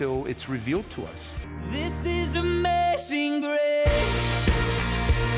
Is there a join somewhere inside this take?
yes; 1 cut; at 1.7 s

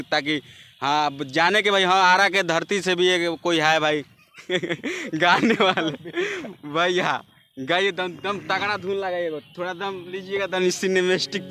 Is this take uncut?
yes; 0 cuts

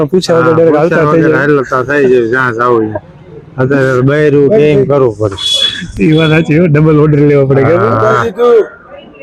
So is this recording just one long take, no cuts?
yes; 0 cuts

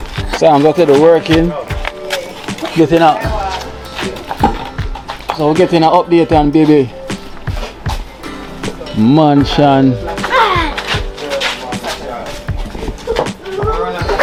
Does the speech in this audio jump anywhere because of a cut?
no; 0 cuts

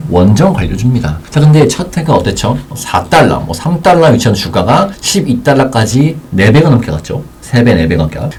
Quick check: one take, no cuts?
yes; 0 cuts

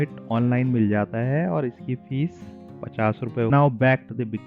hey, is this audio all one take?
no; 1 cut; at 3.5 s

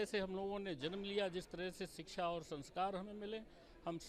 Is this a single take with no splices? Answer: yes; 0 cuts

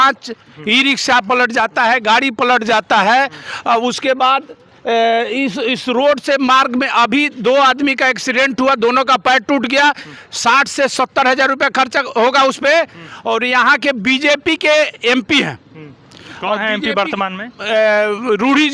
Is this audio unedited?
yes; 0 cuts

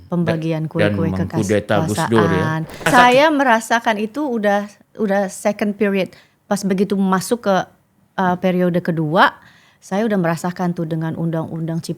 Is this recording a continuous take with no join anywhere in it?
no; 1 cut; at 2.9 s

